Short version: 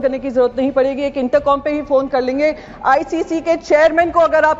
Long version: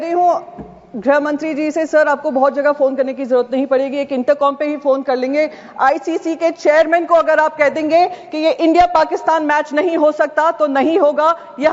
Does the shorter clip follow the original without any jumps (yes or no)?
yes